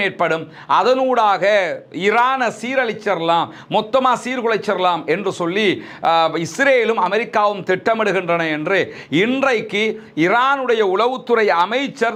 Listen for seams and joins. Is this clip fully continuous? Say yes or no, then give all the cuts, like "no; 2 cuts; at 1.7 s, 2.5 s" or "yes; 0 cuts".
yes; 0 cuts